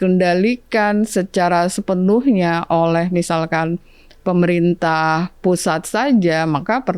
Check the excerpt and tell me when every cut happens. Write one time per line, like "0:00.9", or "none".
none